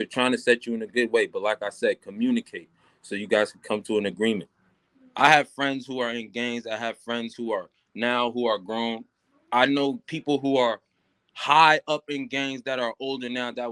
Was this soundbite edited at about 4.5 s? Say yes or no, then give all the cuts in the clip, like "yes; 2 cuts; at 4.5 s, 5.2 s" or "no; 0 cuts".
yes; 1 cut; at 4.5 s